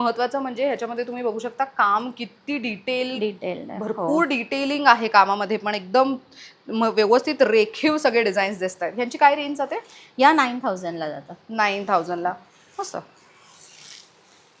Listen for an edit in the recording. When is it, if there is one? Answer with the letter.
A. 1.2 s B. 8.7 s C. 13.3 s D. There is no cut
D